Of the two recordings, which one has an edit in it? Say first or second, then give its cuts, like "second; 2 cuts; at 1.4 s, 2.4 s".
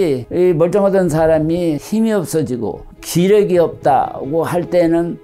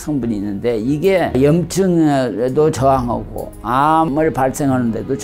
second; 1 cut; at 4.1 s